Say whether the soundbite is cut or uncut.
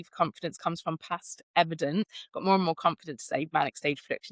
cut